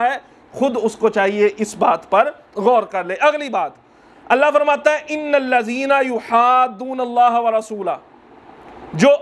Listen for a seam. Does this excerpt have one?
no; 0 cuts

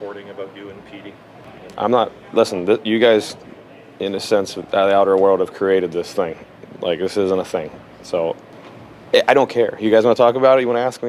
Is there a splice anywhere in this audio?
yes; 2 cuts; at 1.4 s, 8.5 s

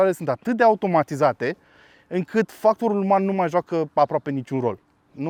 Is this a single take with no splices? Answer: yes; 0 cuts

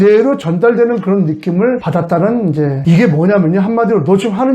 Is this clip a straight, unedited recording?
no; 1 cut; at 2.8 s

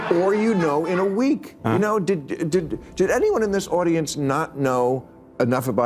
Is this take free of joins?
yes; 0 cuts

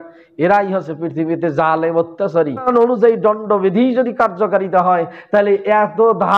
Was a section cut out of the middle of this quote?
yes; 1 cut; at 2.7 s

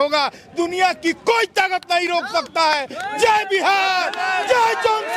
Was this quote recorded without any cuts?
yes; 0 cuts

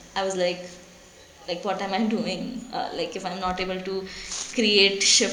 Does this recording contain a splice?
no; 0 cuts

